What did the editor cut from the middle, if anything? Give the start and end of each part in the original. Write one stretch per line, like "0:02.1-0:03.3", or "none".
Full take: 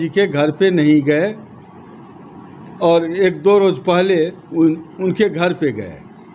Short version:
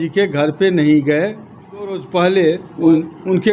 0:02.0-0:03.7